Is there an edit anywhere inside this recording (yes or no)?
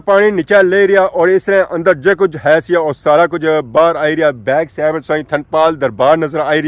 no